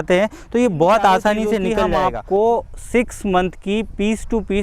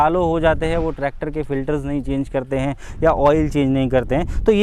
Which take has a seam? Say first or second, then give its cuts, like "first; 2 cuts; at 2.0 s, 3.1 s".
first; 1 cut; at 1.8 s